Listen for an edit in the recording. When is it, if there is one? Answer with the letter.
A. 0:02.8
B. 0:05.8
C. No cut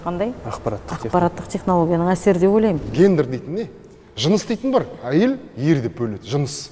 A